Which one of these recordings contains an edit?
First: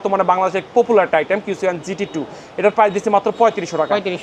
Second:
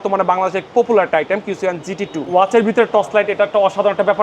second; 1 cut; at 2.2 s

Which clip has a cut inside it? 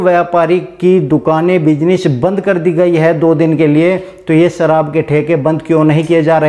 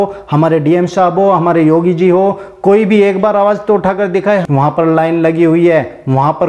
second; 1 cut; at 4.4 s

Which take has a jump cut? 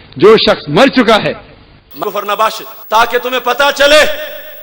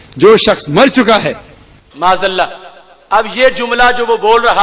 first; 1 cut; at 2.0 s

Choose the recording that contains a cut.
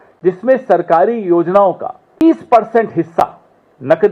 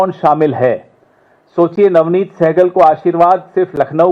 first; 1 cut; at 2.2 s

